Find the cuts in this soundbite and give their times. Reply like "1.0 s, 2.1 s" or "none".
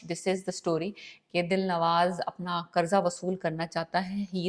none